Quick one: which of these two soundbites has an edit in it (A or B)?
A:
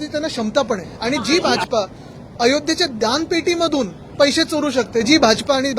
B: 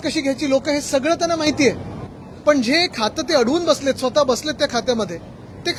A